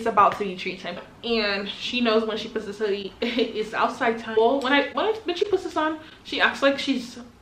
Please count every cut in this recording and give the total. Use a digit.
2